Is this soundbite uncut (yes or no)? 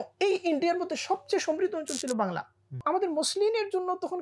no